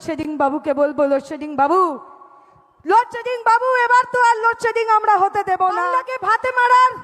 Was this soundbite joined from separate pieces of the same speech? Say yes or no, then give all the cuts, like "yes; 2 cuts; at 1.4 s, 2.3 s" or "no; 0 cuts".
yes; 1 cut; at 5.8 s